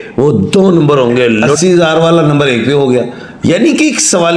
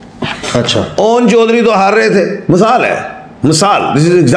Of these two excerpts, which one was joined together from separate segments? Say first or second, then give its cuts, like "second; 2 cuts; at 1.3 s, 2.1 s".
first; 1 cut; at 1.4 s